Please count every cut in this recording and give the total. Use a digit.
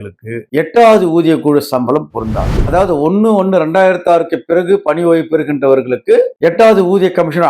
1